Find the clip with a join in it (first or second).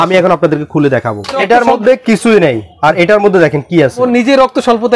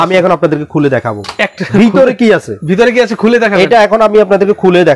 first